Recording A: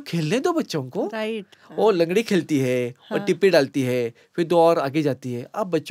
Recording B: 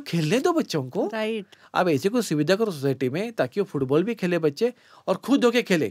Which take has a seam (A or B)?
B